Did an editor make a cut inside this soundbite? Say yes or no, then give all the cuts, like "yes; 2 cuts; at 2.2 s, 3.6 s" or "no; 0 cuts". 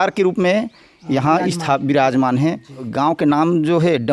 yes; 1 cut; at 2.8 s